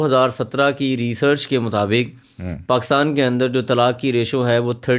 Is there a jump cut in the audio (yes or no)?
no